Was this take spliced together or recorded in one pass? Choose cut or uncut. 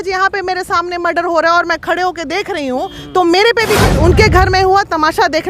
cut